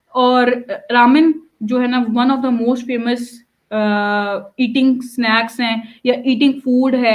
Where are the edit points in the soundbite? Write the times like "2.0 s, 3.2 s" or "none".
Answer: none